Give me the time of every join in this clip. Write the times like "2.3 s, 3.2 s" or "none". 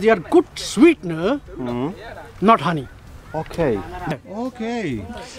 4.1 s